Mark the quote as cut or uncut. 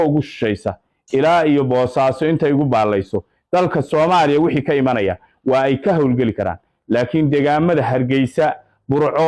uncut